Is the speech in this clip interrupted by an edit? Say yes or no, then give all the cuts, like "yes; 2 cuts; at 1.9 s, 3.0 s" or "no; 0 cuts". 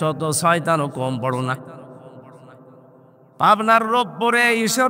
no; 0 cuts